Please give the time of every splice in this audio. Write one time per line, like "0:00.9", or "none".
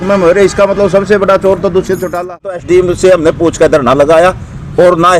0:02.5